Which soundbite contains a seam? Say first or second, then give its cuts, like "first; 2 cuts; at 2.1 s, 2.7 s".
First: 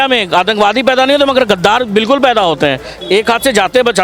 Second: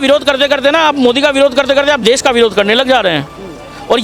first; 1 cut; at 2.9 s